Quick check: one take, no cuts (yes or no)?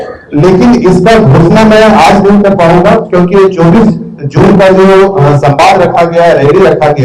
yes